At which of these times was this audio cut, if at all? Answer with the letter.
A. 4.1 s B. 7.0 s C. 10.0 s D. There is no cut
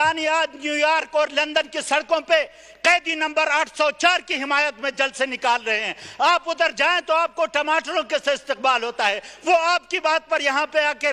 D